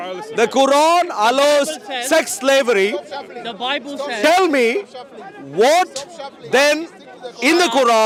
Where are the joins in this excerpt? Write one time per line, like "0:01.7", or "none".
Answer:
none